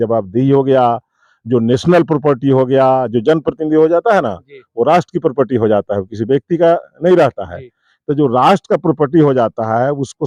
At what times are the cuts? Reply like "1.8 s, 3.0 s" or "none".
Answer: none